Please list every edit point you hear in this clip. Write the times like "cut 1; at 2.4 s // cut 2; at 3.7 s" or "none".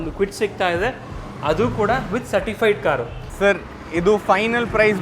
cut 1; at 3.2 s